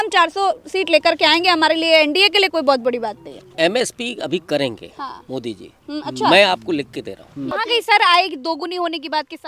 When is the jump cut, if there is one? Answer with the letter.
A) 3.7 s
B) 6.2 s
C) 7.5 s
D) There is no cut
C